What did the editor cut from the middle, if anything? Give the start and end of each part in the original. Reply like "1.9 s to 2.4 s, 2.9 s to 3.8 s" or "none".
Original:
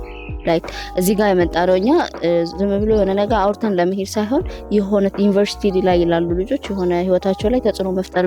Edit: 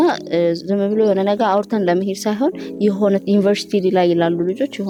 none